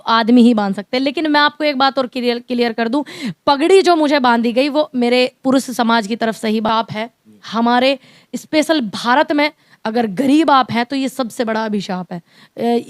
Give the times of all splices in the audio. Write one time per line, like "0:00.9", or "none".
0:06.7